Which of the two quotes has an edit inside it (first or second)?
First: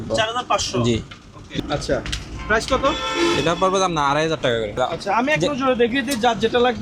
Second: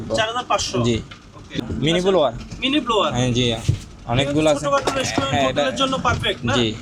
first